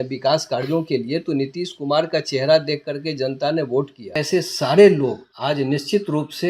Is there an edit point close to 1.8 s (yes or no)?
no